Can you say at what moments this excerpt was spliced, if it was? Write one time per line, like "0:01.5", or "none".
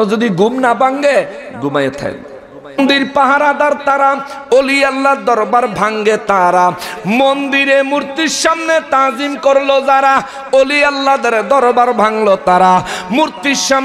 0:02.8